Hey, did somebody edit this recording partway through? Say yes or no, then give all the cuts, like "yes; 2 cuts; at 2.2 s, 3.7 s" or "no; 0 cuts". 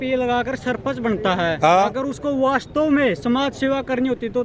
no; 0 cuts